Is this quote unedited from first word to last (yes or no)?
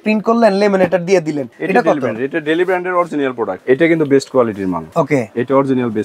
no